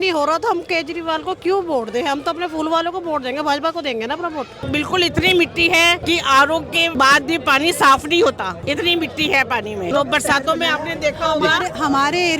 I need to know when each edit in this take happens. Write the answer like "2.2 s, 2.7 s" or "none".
4.7 s, 6.0 s, 6.9 s, 8.6 s, 9.9 s